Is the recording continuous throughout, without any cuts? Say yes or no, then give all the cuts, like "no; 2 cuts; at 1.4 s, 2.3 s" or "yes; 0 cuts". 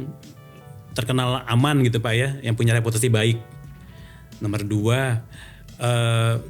yes; 0 cuts